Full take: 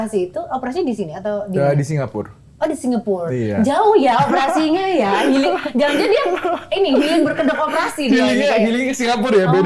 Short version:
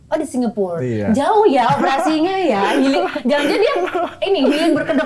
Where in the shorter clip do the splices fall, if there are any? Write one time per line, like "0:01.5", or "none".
none